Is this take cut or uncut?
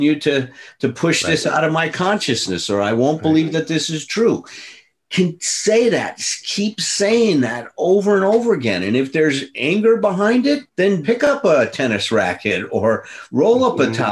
cut